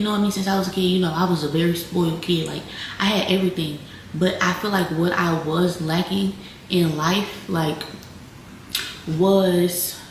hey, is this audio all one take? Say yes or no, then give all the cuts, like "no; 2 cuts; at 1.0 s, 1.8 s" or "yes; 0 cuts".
yes; 0 cuts